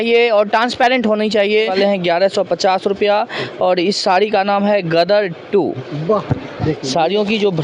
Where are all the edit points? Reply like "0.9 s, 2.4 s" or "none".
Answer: 1.7 s, 6.5 s